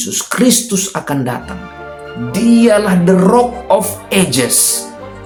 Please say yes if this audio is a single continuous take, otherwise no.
yes